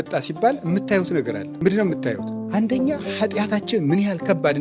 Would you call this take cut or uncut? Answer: cut